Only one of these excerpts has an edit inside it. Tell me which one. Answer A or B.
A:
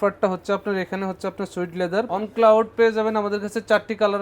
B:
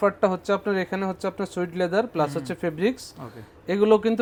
A